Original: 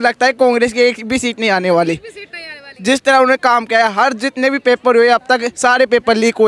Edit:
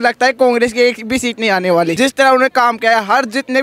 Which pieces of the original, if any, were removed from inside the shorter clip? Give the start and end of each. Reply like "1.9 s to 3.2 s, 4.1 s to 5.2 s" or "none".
1.9 s to 2.8 s